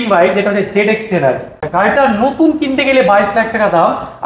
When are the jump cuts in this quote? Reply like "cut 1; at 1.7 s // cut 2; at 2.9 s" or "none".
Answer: cut 1; at 1.6 s